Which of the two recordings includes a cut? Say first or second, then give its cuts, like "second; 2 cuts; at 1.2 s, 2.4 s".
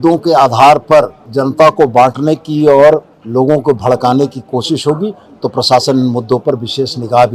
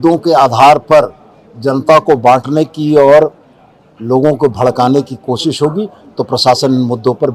first; 2 cuts; at 1.2 s, 3.2 s